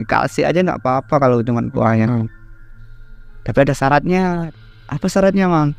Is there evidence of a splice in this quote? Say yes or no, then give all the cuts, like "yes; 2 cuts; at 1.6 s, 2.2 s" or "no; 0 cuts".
yes; 1 cut; at 4.5 s